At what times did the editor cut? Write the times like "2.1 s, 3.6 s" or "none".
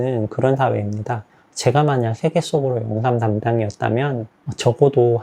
1.1 s, 4.4 s